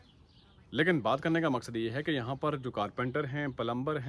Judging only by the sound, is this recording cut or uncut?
uncut